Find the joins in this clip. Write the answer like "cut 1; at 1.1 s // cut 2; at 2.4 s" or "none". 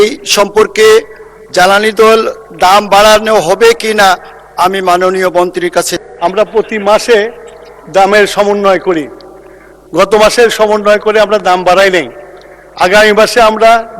cut 1; at 5.9 s